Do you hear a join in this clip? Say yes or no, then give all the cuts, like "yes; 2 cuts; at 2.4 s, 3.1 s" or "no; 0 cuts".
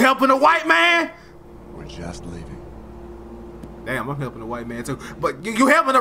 no; 0 cuts